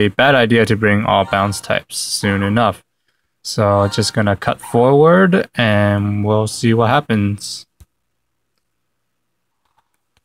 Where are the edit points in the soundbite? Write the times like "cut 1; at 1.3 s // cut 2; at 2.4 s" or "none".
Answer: none